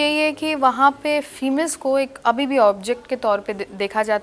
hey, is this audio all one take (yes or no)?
yes